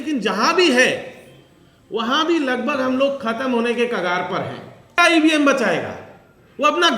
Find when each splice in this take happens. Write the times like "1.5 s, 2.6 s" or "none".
5.0 s